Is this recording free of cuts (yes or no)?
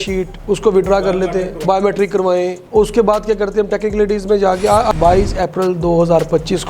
no